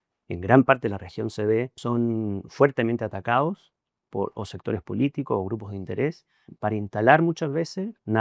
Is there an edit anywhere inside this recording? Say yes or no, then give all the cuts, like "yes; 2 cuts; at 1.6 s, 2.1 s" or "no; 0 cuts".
yes; 2 cuts; at 1.8 s, 6.4 s